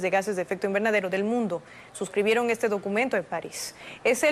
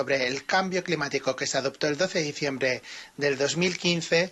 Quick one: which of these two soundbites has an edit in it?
first; 1 cut; at 1.0 s

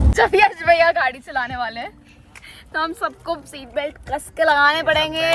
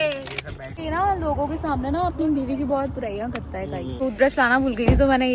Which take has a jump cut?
second; 2 cuts; at 0.8 s, 3.9 s

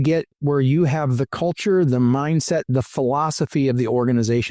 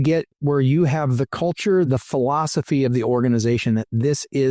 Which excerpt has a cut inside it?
second; 1 cut; at 1.9 s

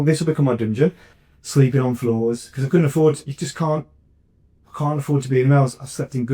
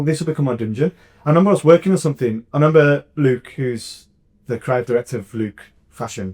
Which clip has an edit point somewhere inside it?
first; 1 cut; at 1.1 s

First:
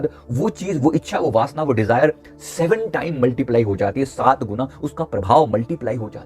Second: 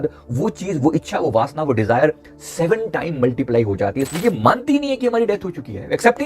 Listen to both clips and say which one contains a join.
second; 1 cut; at 4.1 s

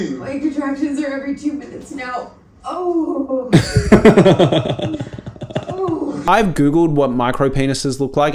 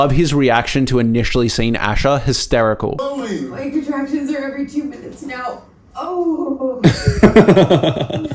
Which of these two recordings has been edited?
first; 1 cut; at 6.2 s

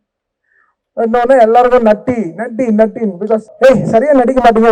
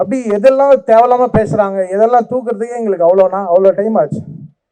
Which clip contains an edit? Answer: first; 1 cut; at 3.5 s

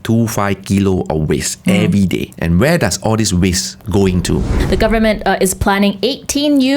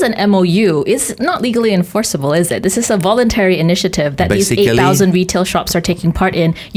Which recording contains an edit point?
first; 3 cuts; at 2.3 s, 3.7 s, 4.6 s

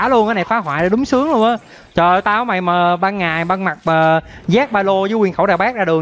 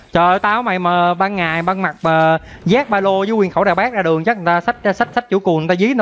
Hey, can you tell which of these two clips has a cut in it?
second; 1 cut; at 5.1 s

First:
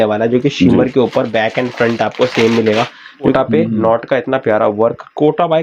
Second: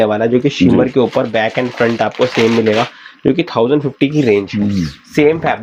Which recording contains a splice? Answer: first; 1 cut; at 3.3 s

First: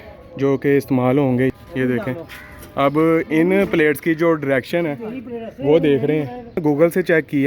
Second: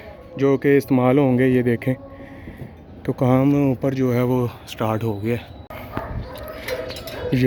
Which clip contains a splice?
first; 2 cuts; at 1.5 s, 6.6 s

